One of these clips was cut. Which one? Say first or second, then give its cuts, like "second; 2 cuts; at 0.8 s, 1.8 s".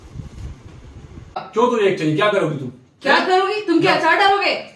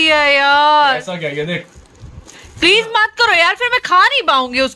first; 1 cut; at 1.4 s